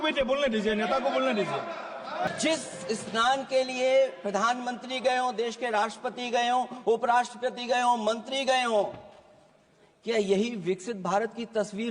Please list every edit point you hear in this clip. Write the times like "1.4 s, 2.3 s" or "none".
2.3 s